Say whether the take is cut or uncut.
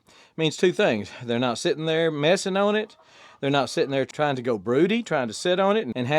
cut